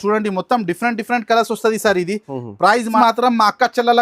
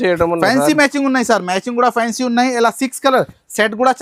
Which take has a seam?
first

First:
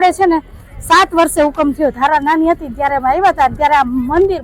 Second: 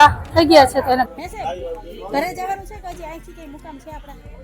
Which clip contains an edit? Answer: second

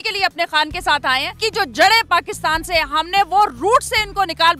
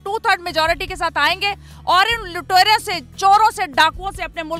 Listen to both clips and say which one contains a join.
first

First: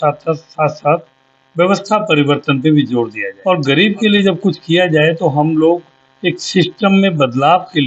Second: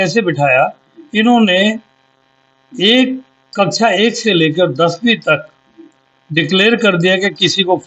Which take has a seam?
first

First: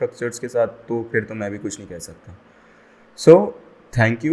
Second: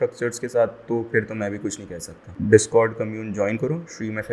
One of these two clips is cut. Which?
second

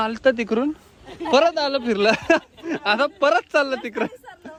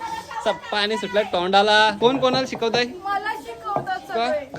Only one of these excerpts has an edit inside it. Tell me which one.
second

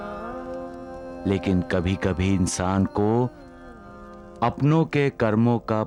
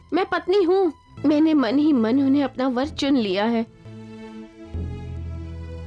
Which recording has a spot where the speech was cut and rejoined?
second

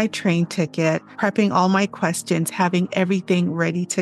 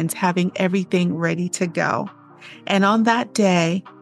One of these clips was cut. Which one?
first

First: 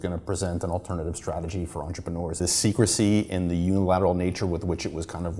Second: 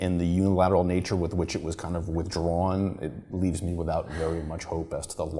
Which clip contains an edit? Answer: first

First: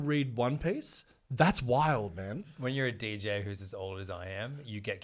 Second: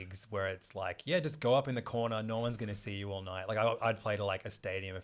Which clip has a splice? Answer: first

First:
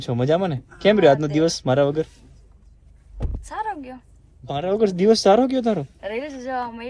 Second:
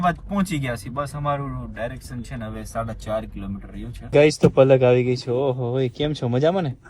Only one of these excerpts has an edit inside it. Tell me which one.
second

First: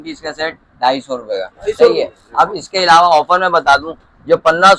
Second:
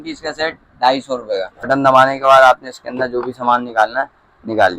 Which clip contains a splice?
second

